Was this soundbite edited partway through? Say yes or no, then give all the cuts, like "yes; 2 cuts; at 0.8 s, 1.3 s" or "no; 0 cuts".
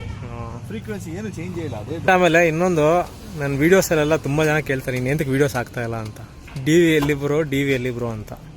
yes; 1 cut; at 2.1 s